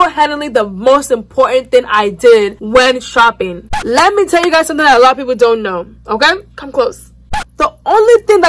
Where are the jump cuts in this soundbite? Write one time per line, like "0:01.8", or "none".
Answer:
0:03.7
0:07.2